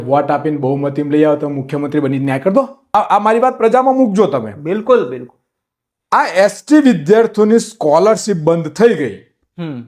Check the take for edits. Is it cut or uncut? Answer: cut